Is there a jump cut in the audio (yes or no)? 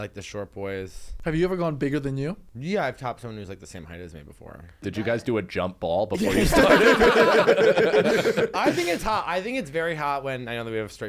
yes